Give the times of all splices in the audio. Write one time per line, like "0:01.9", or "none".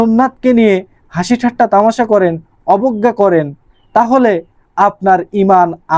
none